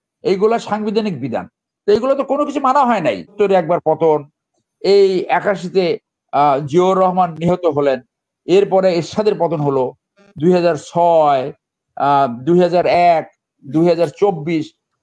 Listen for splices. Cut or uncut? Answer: cut